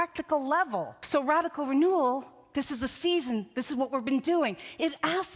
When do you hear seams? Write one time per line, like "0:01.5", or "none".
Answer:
0:01.0